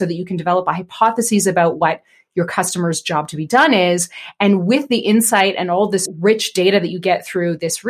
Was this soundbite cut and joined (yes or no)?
yes